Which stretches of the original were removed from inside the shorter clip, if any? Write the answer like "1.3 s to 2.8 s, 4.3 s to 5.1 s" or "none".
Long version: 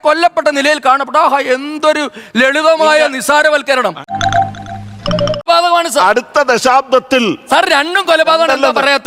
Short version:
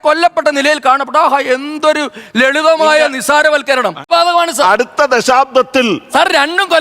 4.0 s to 5.4 s